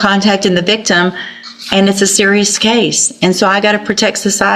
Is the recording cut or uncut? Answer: uncut